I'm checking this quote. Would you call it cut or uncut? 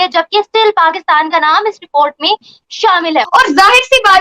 cut